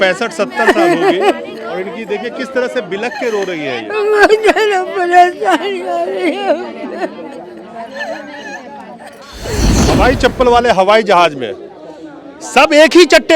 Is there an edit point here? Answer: yes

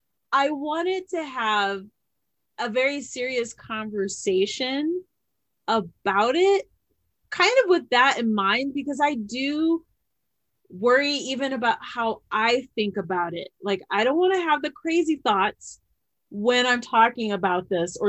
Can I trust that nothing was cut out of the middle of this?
yes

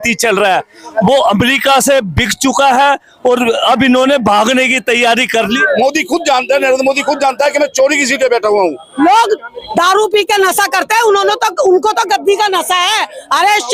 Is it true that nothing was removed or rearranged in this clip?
no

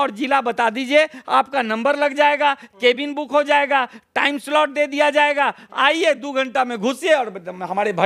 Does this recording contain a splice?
no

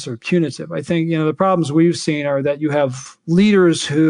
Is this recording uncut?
yes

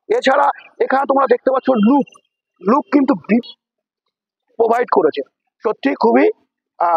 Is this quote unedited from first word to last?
no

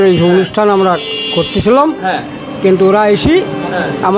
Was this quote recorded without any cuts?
yes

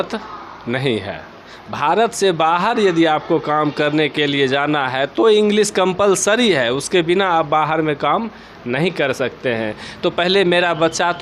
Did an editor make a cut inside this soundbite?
no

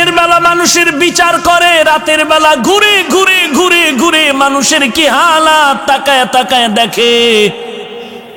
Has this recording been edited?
no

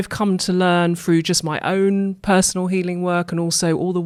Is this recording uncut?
yes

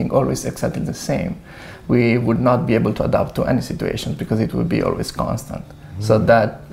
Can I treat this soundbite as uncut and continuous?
yes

